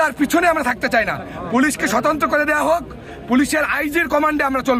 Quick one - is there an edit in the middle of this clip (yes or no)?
no